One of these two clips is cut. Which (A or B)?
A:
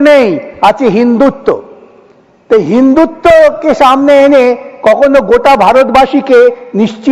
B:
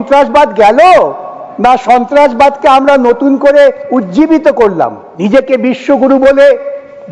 B